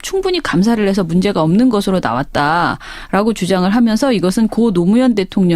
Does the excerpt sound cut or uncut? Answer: cut